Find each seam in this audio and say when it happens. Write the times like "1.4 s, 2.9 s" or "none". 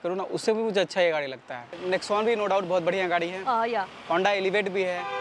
1.8 s